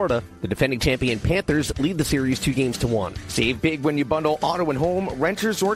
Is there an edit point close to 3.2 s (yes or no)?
yes